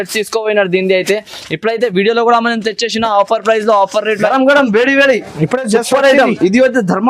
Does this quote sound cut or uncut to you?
cut